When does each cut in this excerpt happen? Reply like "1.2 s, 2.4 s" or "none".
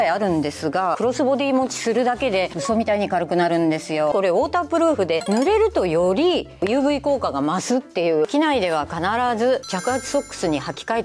1.0 s, 4.1 s, 5.2 s, 8.3 s